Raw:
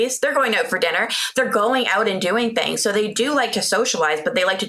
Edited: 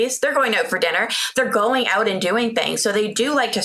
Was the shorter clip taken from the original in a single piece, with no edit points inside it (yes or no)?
yes